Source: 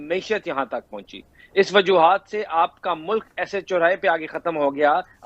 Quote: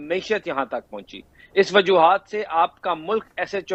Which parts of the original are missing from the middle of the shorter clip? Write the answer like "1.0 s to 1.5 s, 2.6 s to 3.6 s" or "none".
none